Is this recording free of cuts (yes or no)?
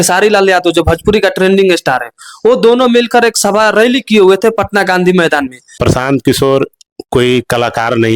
no